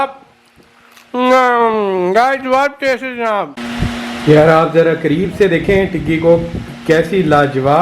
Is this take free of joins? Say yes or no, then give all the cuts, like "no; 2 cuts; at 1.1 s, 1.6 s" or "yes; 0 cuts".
no; 1 cut; at 3.6 s